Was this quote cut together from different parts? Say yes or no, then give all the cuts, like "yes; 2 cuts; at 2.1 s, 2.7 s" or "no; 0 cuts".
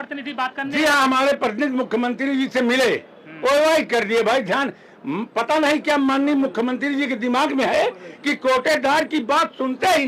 no; 0 cuts